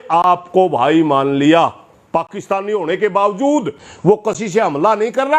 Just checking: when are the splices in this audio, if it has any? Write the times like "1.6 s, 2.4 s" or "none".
3.8 s